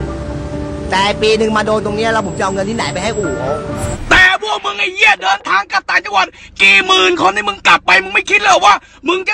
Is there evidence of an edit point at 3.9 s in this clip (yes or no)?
yes